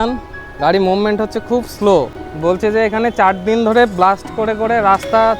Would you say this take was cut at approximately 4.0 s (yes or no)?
no